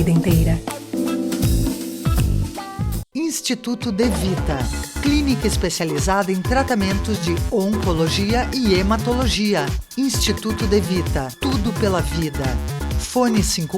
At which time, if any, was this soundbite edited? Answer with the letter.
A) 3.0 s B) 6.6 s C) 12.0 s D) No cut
A